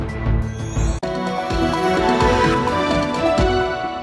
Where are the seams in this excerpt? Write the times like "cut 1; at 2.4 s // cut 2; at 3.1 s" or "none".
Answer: none